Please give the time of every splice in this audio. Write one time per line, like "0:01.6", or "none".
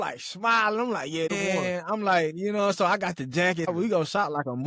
0:01.3
0:03.7